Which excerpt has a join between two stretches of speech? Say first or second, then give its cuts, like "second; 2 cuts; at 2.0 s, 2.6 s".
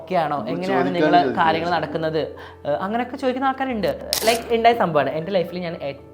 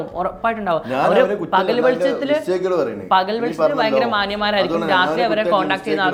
first; 1 cut; at 4.1 s